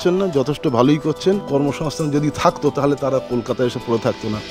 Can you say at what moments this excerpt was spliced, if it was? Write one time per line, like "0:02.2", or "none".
0:01.4